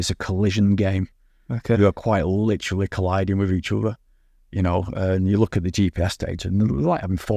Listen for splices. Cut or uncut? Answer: uncut